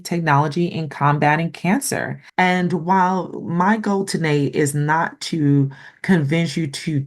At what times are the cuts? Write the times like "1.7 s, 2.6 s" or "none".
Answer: 2.2 s